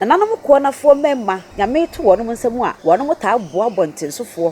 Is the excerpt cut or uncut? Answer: cut